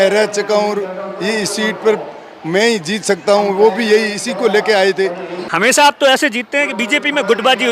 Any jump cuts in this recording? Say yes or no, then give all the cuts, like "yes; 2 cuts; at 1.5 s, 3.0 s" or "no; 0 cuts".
yes; 1 cut; at 5.4 s